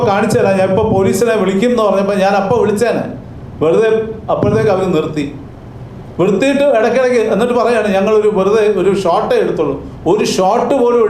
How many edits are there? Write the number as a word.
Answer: zero